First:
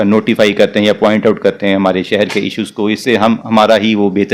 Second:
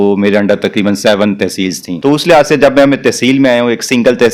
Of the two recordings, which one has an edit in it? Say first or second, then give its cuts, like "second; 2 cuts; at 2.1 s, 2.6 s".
second; 1 cut; at 1.8 s